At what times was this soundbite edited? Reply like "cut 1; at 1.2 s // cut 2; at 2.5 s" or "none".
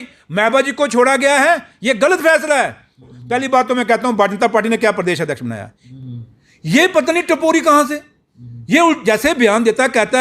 cut 1; at 3.1 s // cut 2; at 5.8 s